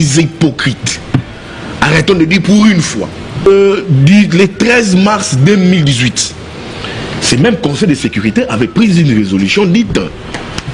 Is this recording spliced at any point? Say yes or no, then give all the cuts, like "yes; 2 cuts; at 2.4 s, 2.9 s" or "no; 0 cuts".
yes; 1 cut; at 3.5 s